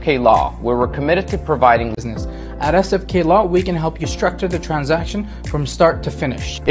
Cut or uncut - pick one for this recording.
cut